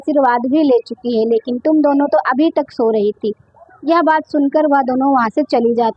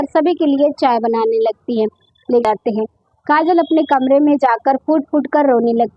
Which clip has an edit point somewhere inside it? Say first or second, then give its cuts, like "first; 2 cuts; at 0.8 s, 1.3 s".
second; 1 cut; at 2.4 s